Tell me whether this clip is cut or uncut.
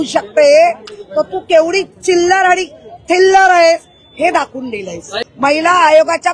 cut